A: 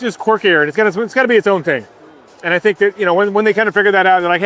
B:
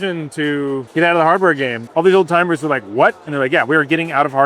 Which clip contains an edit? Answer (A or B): B